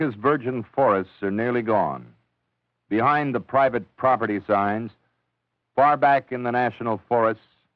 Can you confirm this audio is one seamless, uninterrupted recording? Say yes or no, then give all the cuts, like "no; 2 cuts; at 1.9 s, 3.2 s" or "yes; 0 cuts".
yes; 0 cuts